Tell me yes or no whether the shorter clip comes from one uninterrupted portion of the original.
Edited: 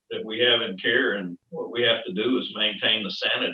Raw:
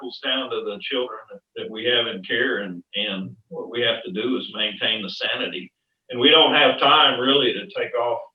no